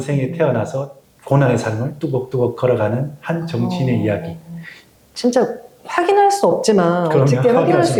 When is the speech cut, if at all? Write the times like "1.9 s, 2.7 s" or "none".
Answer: none